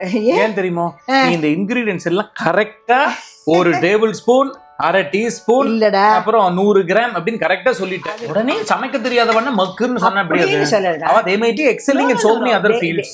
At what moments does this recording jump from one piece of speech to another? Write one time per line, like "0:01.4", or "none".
0:08.1